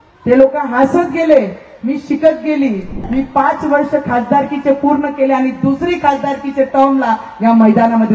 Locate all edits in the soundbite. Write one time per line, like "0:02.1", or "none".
0:03.0